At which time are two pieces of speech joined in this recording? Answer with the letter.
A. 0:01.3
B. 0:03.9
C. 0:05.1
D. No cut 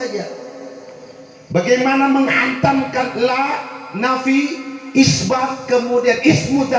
D